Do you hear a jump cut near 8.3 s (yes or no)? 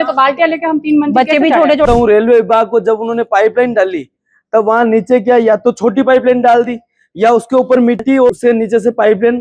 yes